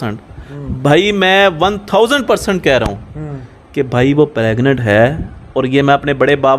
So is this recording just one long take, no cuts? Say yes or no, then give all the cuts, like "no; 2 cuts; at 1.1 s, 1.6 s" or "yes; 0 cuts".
yes; 0 cuts